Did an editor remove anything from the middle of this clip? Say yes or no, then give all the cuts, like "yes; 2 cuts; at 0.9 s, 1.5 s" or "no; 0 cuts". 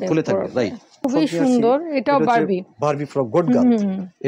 yes; 1 cut; at 1.0 s